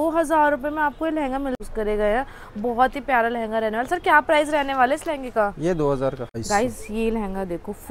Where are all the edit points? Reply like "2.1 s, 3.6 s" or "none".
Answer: 1.6 s, 6.3 s

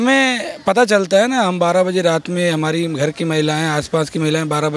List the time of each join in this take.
none

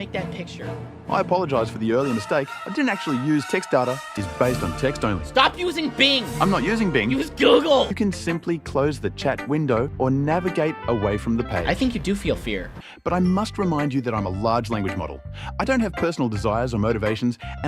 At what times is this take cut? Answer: 4.1 s, 7.9 s, 12.8 s

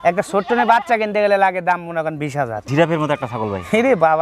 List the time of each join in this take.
2.7 s

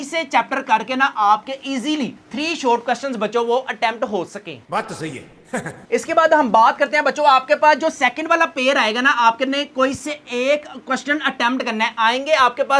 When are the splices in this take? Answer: none

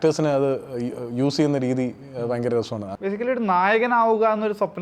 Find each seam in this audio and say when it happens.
2.9 s

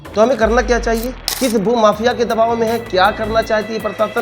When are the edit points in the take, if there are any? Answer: 1.2 s

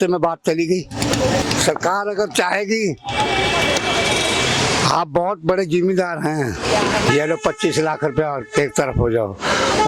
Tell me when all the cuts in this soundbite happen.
none

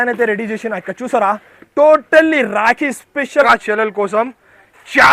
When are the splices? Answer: 3.4 s

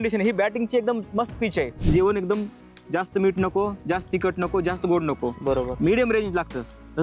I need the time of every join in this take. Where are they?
1.8 s

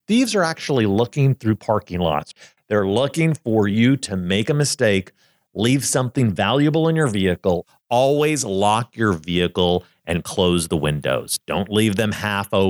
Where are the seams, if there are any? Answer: 2.3 s, 7.7 s

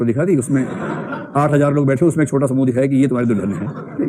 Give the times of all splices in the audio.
none

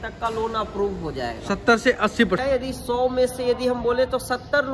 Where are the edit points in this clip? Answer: 2.4 s

